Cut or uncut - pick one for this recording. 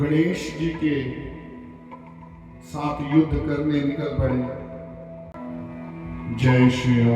cut